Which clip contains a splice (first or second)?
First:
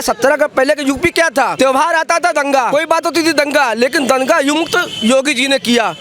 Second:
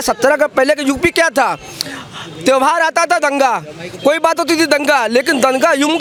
first